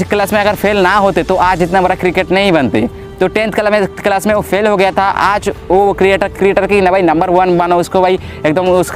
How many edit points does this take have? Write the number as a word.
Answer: zero